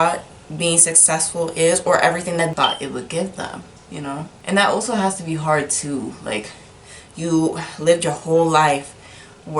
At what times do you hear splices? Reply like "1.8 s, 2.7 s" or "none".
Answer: 2.5 s